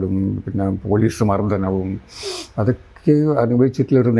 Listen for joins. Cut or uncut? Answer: uncut